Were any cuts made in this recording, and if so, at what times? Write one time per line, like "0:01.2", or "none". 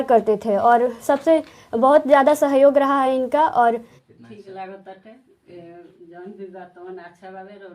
0:03.9